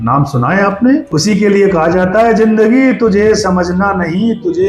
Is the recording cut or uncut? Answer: cut